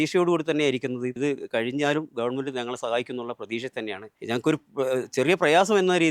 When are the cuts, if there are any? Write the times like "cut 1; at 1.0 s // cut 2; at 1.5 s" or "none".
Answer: cut 1; at 1.2 s // cut 2; at 4.1 s